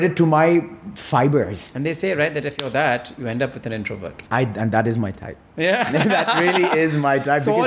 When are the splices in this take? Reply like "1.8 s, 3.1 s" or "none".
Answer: none